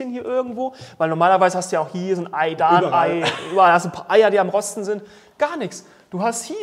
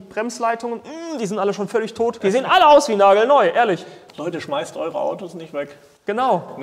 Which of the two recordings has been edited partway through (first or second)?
second